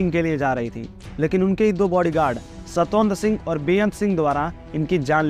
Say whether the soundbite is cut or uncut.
uncut